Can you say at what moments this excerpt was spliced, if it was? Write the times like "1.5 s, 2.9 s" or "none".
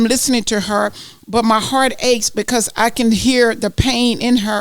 none

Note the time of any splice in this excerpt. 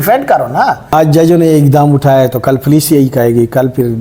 0.9 s

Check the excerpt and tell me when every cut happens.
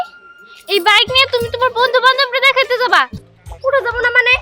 3.2 s

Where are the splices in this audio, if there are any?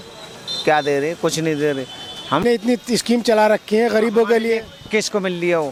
none

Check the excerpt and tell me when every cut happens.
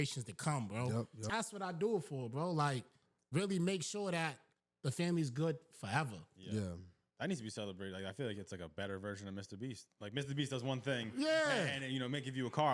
1.2 s

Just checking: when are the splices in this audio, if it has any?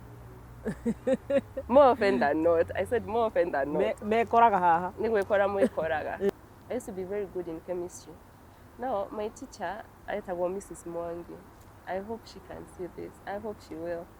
6.3 s

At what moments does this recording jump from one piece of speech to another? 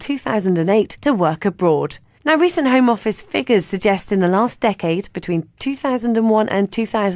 3.0 s

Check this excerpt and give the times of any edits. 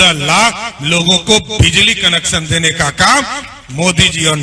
none

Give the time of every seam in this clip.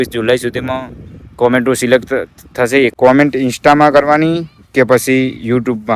2.9 s

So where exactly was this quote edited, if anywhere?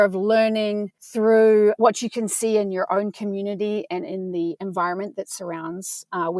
1.0 s

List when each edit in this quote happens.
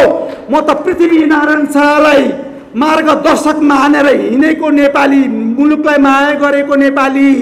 none

